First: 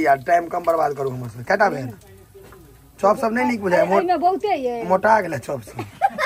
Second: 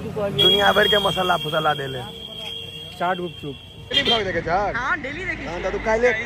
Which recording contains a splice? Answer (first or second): second